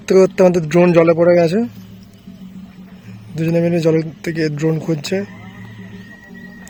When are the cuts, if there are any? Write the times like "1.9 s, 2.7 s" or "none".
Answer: none